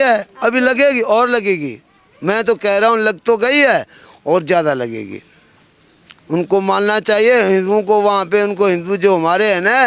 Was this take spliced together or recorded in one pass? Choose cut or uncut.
uncut